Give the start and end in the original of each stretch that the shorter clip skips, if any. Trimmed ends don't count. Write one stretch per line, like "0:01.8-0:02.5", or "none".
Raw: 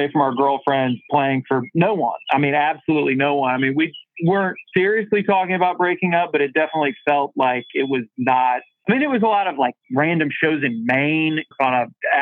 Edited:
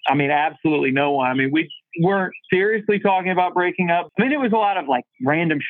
0:06.3-0:08.7